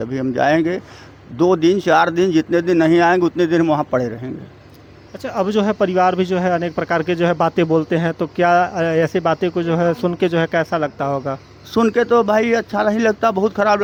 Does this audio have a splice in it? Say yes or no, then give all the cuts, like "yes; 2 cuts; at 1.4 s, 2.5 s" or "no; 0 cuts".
no; 0 cuts